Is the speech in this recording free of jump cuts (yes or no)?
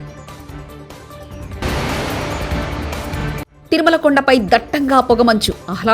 no